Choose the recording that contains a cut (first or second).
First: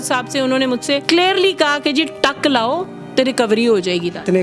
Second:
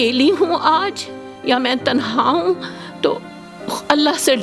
first